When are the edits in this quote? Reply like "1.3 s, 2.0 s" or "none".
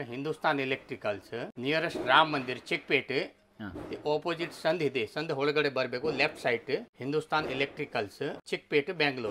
1.5 s, 6.9 s, 8.4 s